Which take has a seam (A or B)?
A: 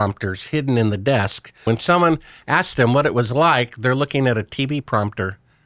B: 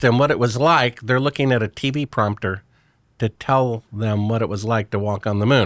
A